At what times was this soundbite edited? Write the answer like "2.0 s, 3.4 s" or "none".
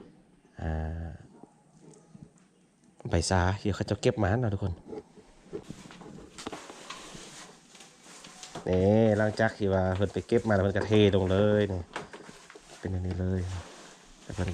5.7 s